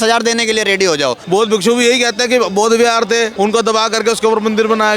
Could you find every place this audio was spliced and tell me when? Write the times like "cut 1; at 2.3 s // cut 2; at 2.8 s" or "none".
cut 1; at 1.2 s // cut 2; at 3.3 s